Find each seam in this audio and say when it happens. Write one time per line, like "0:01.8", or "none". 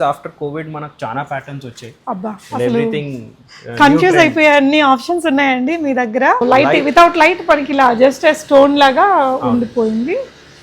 0:06.4

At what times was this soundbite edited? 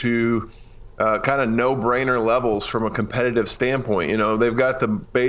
0:04.1

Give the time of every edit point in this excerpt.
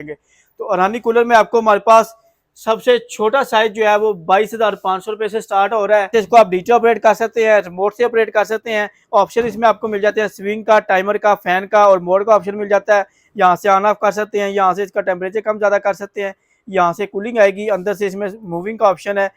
0:06.1

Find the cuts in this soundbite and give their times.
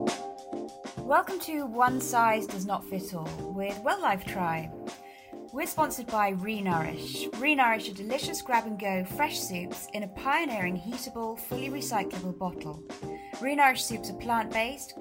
0:01.0

